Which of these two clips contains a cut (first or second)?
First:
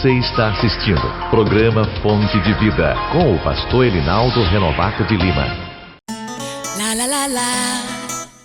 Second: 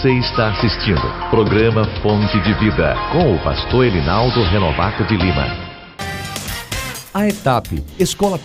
first